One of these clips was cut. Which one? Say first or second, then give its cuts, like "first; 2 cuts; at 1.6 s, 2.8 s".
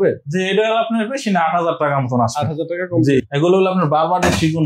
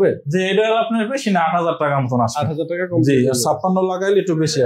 first; 1 cut; at 3.2 s